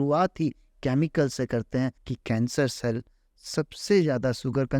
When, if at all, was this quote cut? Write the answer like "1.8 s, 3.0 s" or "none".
2.1 s